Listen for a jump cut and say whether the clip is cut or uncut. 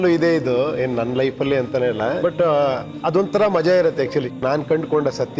cut